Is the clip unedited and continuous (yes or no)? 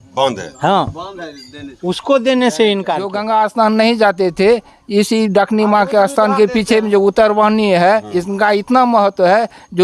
no